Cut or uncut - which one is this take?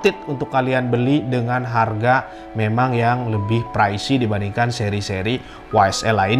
uncut